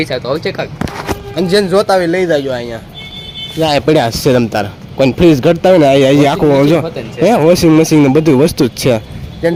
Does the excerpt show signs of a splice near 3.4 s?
no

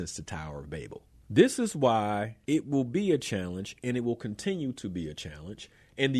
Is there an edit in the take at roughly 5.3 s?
no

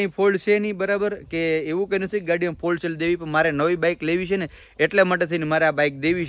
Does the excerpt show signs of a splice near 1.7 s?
no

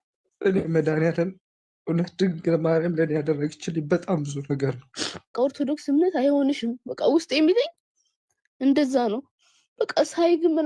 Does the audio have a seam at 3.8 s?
no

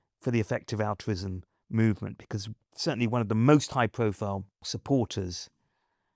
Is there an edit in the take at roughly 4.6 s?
yes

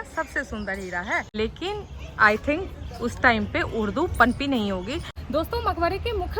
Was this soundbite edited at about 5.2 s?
yes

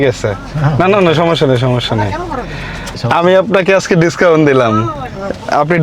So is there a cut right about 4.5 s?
no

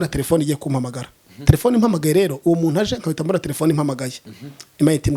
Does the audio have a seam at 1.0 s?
no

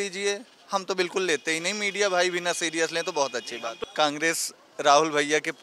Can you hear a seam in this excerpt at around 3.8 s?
yes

